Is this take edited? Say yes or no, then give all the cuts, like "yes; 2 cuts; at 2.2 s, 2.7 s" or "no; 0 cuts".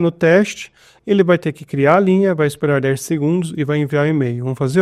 no; 0 cuts